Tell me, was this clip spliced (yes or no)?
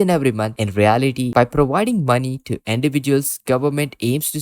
yes